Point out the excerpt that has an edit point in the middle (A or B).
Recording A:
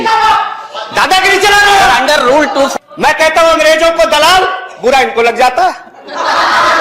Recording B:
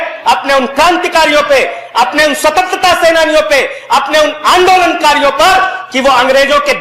A